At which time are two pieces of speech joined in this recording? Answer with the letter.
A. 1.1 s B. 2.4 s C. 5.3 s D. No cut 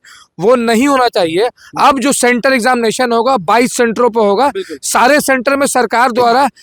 D